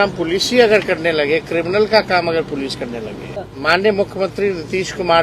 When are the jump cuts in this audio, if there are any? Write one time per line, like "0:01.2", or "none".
0:03.3